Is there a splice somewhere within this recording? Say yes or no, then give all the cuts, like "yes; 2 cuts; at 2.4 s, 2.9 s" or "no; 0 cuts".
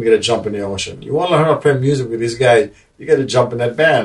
no; 0 cuts